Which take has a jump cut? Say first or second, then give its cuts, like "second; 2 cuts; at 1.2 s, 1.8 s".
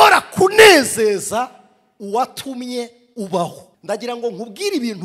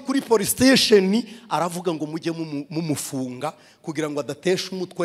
first; 1 cut; at 3.7 s